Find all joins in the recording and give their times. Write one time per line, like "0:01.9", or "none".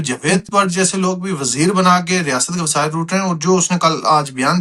none